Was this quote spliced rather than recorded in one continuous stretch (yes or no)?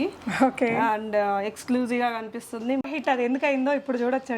yes